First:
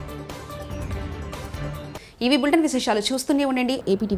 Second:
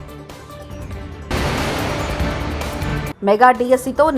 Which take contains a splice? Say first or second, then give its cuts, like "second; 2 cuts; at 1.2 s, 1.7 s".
second; 2 cuts; at 1.3 s, 3.0 s